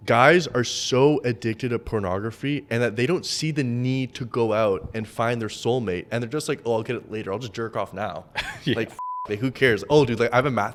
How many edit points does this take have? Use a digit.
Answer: 0